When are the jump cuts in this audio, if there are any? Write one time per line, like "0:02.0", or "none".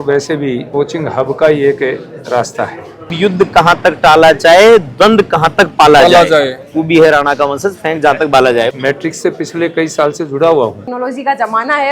0:03.1
0:08.7
0:10.8